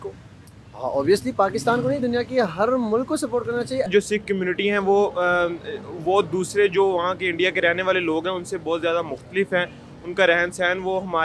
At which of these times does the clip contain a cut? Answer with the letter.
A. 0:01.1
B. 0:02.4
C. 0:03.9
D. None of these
C